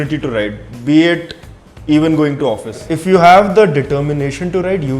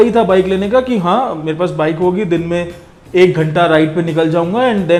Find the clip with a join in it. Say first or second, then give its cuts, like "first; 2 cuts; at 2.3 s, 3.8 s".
first; 1 cut; at 2.9 s